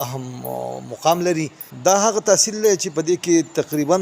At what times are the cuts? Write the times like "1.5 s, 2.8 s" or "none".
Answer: 1.6 s